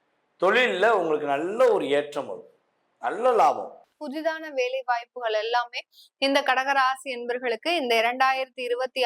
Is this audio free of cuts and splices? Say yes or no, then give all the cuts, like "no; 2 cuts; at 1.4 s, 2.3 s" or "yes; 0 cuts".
no; 1 cut; at 4.0 s